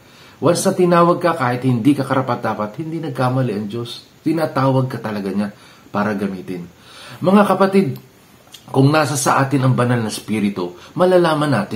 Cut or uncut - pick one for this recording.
uncut